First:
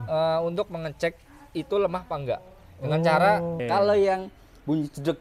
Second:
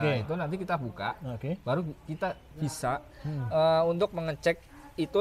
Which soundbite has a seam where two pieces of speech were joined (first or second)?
first